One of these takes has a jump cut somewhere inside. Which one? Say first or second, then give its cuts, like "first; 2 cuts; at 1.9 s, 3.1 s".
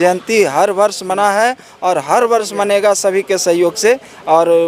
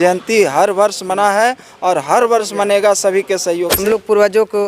second; 1 cut; at 3.7 s